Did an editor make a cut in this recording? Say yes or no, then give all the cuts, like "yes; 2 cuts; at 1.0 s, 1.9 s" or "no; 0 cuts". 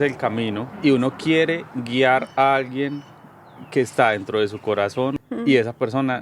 yes; 1 cut; at 5.1 s